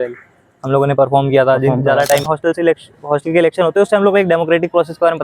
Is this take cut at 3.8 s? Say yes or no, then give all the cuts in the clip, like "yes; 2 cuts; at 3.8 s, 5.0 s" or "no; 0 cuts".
no; 1 cut; at 2.2 s